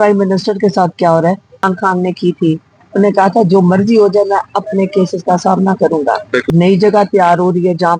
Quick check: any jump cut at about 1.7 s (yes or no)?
yes